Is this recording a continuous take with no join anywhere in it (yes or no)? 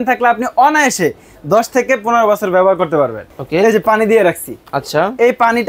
no